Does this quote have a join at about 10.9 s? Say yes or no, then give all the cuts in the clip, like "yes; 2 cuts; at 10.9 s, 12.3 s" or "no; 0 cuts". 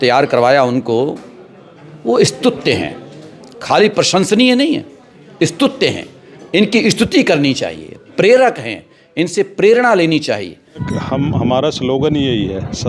yes; 1 cut; at 10.9 s